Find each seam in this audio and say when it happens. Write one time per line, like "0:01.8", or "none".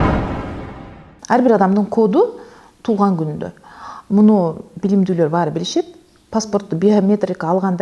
0:01.1